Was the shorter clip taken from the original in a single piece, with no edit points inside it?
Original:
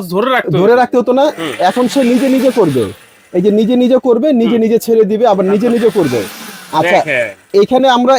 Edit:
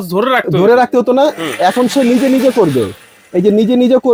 yes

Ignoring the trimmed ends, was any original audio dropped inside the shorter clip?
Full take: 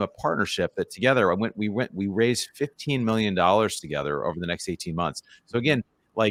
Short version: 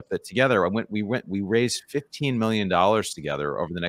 no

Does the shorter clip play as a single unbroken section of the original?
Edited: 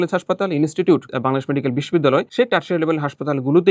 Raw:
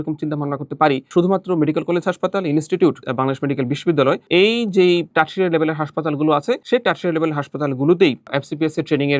no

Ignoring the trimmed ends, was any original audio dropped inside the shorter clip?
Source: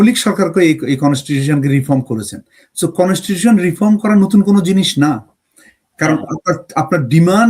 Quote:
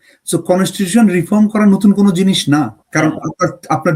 yes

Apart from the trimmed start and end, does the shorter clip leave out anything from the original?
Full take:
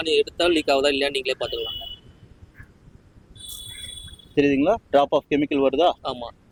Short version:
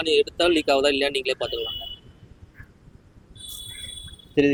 no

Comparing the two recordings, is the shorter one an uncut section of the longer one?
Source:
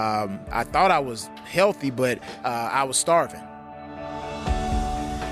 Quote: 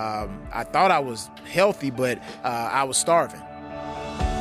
no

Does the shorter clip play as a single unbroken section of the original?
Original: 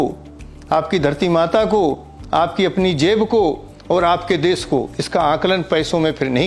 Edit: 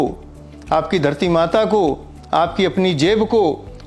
yes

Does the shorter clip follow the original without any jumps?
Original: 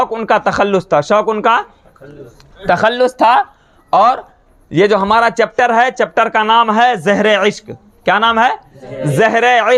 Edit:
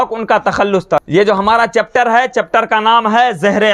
no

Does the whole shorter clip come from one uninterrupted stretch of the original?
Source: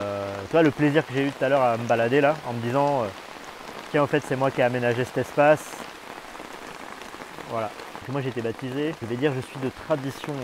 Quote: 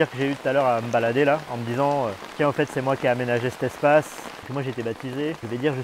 no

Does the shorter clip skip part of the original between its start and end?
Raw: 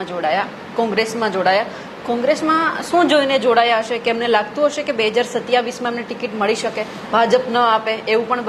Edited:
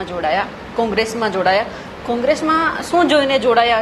no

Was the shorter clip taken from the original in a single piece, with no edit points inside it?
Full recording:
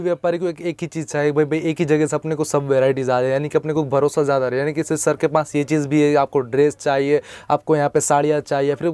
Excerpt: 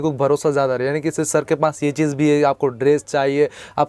yes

